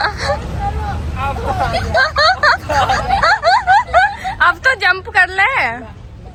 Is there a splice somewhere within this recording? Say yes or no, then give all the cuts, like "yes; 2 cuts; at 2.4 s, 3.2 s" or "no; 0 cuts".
no; 0 cuts